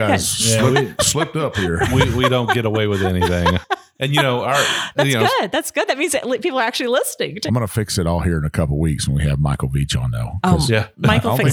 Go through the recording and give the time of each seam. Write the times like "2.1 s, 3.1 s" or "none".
7.4 s